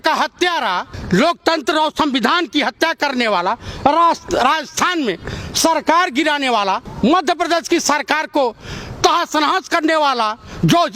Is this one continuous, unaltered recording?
no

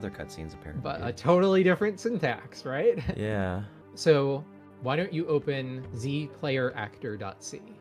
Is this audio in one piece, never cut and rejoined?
no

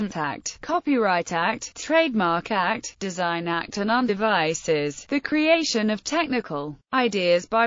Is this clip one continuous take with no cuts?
yes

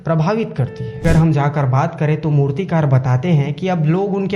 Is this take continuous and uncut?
no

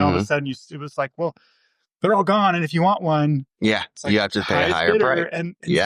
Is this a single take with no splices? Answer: yes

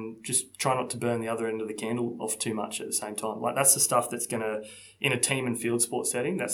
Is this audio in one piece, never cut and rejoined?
yes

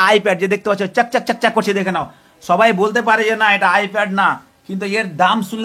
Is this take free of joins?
yes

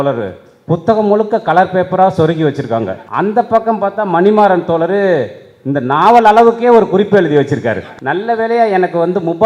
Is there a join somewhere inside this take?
yes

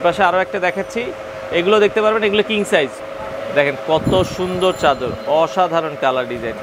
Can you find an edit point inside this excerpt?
yes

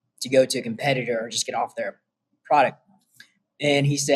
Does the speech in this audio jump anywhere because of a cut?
no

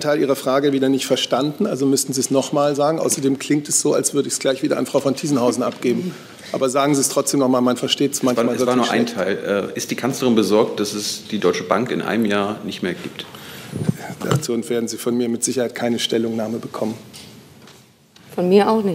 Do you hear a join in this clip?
no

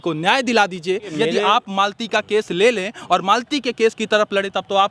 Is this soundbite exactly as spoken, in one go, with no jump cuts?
no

